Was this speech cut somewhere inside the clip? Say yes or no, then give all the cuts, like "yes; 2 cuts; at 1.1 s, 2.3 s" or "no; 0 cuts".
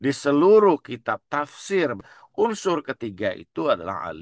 yes; 1 cut; at 2.1 s